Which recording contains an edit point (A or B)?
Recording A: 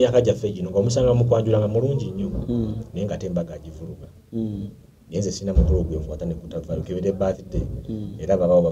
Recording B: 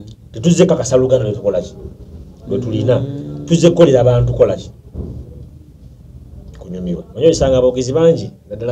B